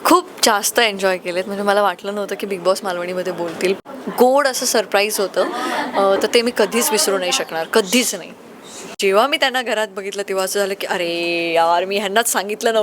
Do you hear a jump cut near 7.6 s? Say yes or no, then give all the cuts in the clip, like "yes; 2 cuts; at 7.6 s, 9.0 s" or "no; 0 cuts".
no; 2 cuts; at 3.8 s, 9.0 s